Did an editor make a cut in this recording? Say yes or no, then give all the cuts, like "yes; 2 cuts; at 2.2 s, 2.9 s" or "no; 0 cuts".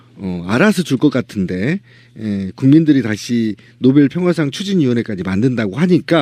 yes; 1 cut; at 3.8 s